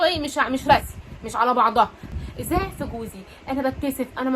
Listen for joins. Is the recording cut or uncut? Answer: cut